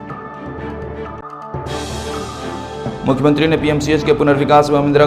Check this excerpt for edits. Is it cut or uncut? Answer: cut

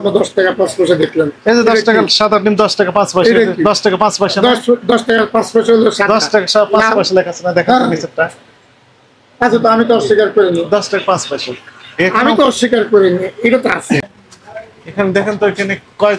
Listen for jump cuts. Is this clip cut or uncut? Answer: cut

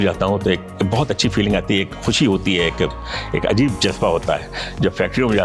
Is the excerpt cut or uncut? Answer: uncut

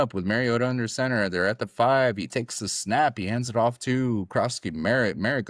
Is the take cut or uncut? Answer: uncut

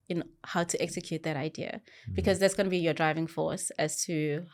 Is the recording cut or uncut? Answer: uncut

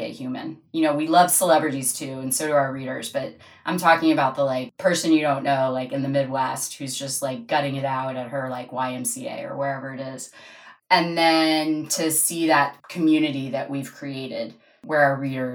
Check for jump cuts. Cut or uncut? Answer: cut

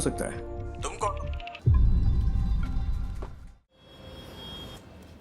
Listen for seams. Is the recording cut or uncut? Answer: cut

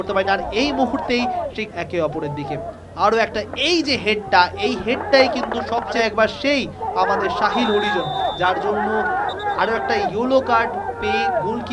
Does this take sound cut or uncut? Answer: cut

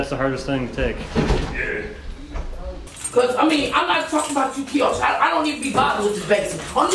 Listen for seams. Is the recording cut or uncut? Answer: cut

